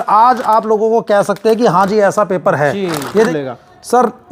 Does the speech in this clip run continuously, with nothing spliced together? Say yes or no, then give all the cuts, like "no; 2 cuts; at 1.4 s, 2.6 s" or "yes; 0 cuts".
no; 1 cut; at 3.3 s